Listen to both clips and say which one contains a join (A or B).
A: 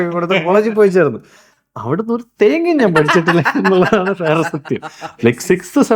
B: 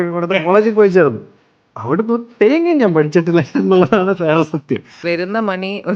B